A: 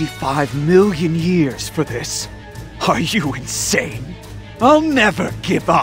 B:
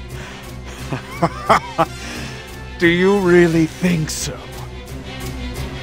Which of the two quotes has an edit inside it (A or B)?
B